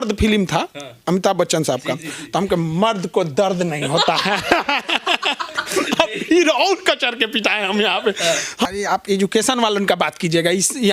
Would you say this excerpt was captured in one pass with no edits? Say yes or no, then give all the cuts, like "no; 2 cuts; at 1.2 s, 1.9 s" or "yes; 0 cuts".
no; 1 cut; at 8.7 s